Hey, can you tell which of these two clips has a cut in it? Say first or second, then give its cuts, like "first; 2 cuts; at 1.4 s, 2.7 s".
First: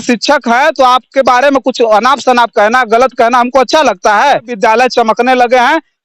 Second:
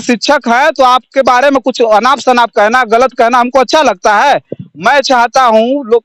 first; 1 cut; at 4.5 s